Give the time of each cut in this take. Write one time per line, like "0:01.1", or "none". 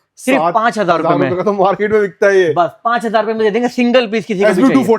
none